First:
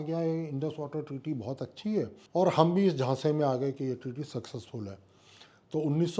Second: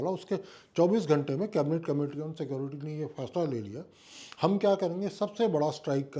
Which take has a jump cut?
first; 1 cut; at 2.2 s

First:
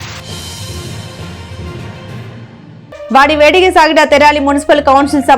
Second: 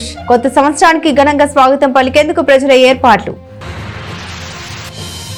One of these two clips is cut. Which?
first; 1 cut; at 3.0 s

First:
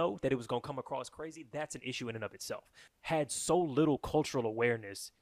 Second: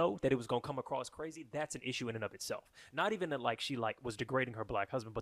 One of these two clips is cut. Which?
first; 1 cut; at 2.8 s

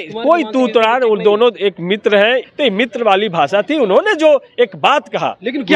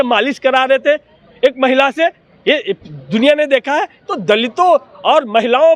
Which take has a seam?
first; 1 cut; at 2.5 s

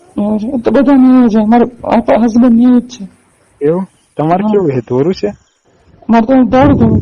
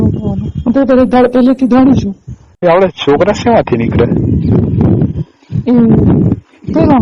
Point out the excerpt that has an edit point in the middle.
second; 1 cut; at 2.4 s

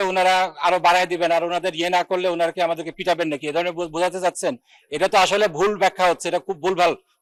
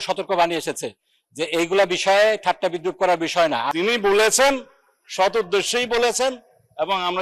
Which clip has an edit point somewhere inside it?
second; 1 cut; at 3.7 s

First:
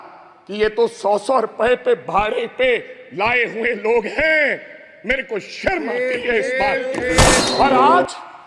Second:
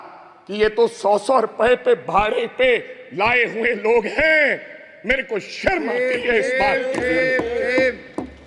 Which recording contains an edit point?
first; 1 cut; at 7.5 s

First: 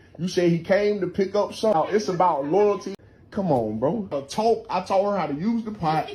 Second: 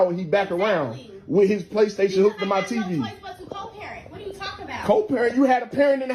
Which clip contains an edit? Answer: first; 2 cuts; at 2.9 s, 4.1 s

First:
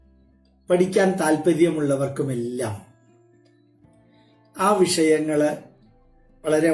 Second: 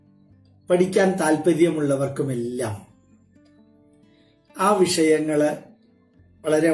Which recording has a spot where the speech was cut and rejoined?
second; 2 cuts; at 2.9 s, 4.5 s

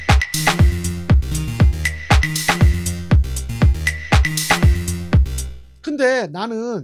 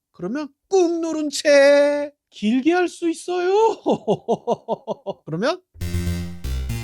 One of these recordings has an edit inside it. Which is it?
second; 2 cuts; at 2.2 s, 5.7 s

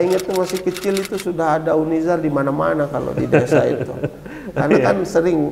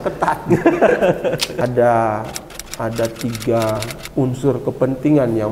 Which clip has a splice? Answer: second; 1 cut; at 1.5 s

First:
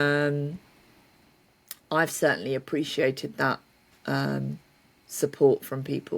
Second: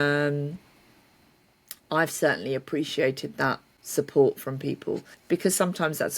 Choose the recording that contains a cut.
second; 2 cuts; at 3.7 s, 5.1 s

